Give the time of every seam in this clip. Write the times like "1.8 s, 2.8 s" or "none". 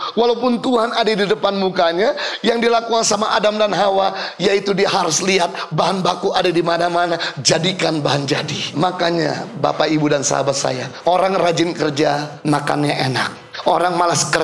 8.7 s, 10.9 s, 12.3 s, 13.4 s